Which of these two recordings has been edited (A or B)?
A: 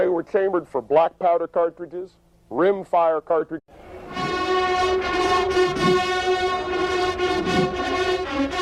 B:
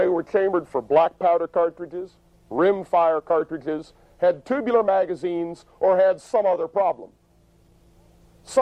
B